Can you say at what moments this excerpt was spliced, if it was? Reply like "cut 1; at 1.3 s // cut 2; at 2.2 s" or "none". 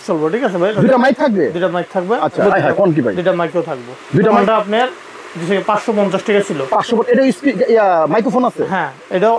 cut 1; at 2.4 s // cut 2; at 4.4 s